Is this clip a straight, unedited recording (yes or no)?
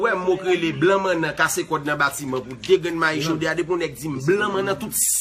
yes